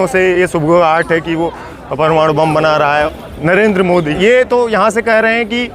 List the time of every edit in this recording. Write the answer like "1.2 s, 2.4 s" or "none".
3.1 s, 4.1 s

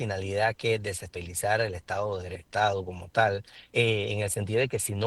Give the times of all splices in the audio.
1.1 s, 2.4 s, 3.5 s

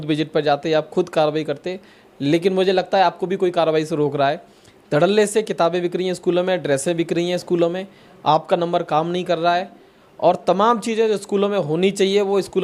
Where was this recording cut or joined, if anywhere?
none

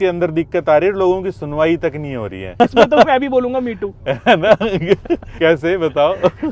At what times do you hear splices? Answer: 2.5 s, 5.3 s

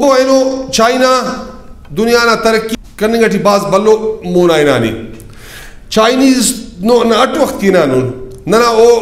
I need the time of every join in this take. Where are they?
2.8 s

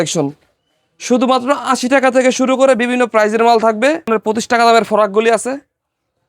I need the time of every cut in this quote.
4.1 s

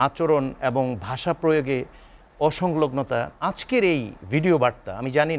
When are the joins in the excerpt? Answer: 3.3 s

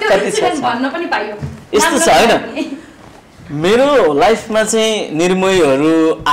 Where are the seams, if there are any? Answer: none

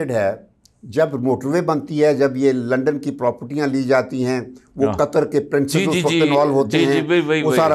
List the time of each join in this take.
none

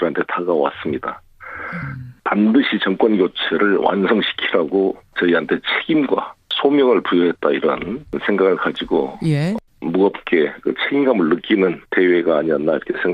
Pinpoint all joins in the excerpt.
10.8 s

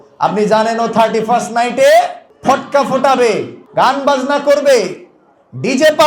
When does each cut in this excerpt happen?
2.2 s, 3.6 s

